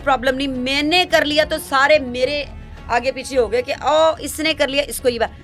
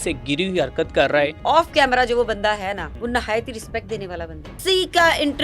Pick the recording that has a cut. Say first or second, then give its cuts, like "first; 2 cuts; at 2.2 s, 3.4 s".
second; 3 cuts; at 1.4 s, 2.9 s, 4.6 s